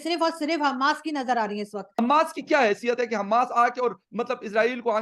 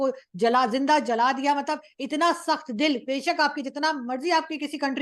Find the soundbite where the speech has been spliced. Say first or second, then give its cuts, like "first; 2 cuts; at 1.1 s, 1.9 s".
first; 1 cut; at 1.9 s